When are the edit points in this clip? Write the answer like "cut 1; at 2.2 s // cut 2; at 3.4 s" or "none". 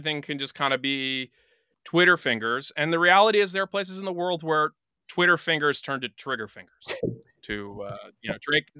cut 1; at 1.7 s